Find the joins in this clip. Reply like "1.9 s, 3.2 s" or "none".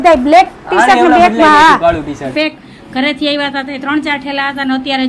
2.2 s

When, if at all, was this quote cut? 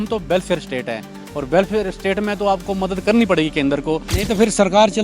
4.1 s

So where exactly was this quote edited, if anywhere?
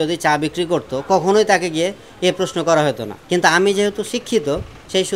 3.1 s

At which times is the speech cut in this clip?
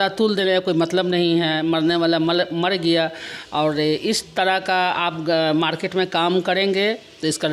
none

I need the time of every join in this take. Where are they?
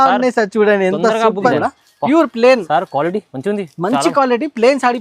1.5 s

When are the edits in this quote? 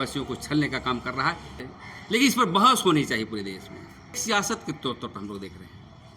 1.5 s, 4.2 s

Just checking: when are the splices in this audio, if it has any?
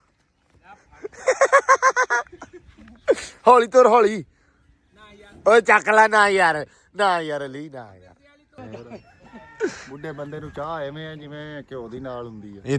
8.6 s

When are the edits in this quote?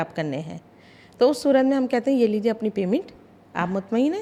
none

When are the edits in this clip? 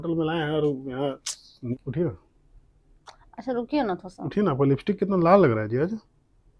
1.7 s

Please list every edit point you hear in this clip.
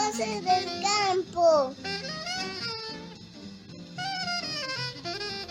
1.7 s

